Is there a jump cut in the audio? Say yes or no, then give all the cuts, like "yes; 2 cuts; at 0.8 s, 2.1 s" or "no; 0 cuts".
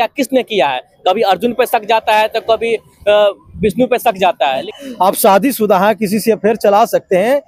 yes; 1 cut; at 4.7 s